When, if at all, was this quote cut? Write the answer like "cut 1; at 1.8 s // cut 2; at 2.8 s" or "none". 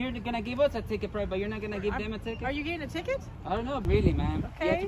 cut 1; at 3.8 s